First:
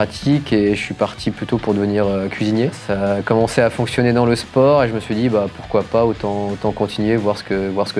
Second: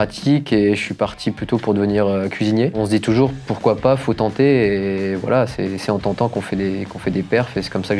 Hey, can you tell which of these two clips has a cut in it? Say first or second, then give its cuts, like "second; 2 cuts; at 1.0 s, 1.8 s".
second; 1 cut; at 2.8 s